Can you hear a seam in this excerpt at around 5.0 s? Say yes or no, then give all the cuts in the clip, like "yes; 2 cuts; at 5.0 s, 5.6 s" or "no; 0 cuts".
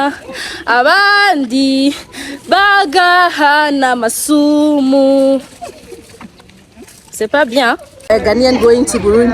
no; 1 cut; at 8.1 s